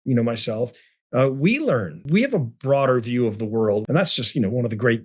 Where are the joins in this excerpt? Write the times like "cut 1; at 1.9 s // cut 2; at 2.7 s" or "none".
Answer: cut 1; at 2.0 s // cut 2; at 3.8 s